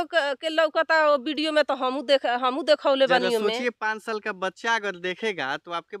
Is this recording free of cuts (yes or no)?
yes